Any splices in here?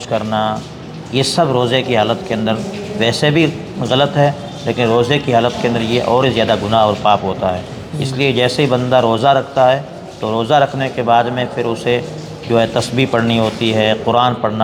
no; 0 cuts

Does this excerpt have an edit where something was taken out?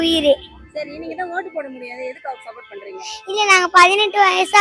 no; 0 cuts

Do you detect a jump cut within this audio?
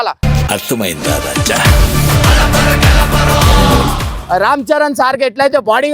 yes; 1 cut; at 4.1 s

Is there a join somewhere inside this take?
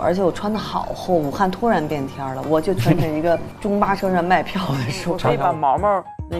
yes; 1 cut; at 5.3 s

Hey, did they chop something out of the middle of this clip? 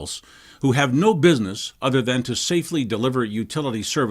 yes; 1 cut; at 3.1 s

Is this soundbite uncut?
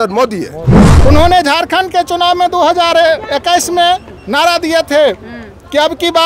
no; 1 cut; at 0.9 s

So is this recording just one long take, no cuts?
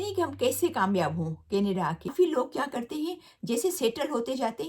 no; 1 cut; at 2.1 s

